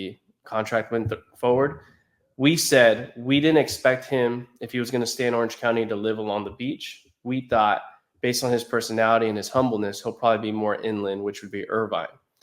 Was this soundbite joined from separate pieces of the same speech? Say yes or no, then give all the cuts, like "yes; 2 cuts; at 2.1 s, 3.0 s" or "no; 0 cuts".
no; 0 cuts